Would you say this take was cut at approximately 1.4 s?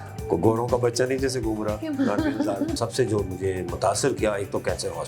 no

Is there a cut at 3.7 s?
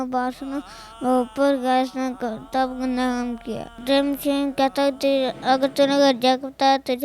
yes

